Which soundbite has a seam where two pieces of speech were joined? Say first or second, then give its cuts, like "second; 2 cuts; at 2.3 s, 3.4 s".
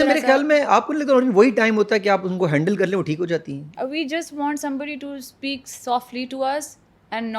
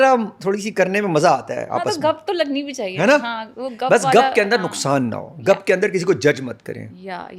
first; 1 cut; at 3.8 s